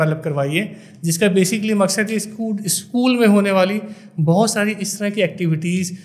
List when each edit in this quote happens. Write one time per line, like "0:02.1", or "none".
none

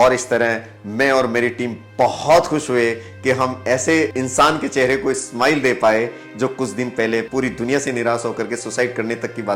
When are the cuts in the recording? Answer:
0:04.1
0:07.3

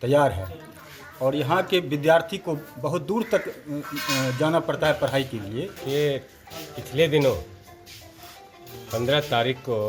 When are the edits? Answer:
0:05.8

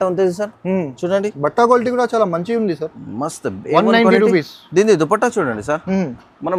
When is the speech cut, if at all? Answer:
none

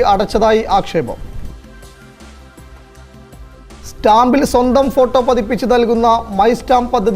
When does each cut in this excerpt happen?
0:01.4
0:04.0

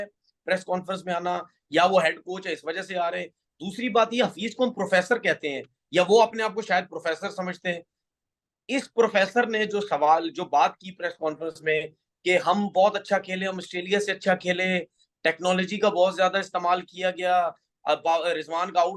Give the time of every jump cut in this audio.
none

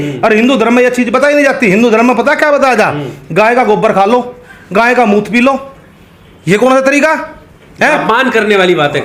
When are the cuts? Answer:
none

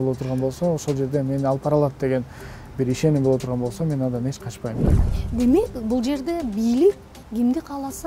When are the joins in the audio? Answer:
0:05.0

